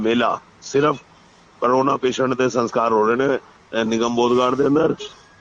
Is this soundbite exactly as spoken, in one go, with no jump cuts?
yes; 0 cuts

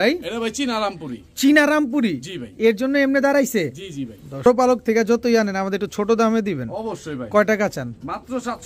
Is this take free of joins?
no; 1 cut; at 4.4 s

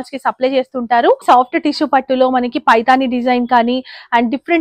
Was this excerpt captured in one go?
no; 1 cut; at 1.2 s

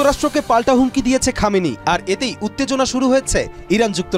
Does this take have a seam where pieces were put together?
no; 0 cuts

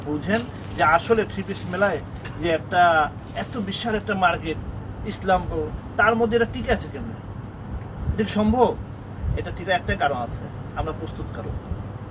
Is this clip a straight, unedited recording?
yes; 0 cuts

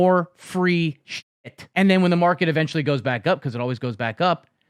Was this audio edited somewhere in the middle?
yes; 1 cut; at 1.1 s

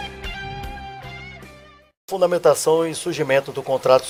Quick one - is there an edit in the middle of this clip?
no; 0 cuts

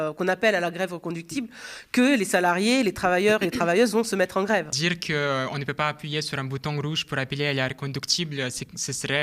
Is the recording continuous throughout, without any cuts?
no; 1 cut; at 4.7 s

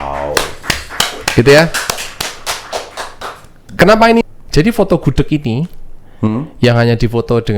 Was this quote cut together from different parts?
yes; 1 cut; at 4.2 s

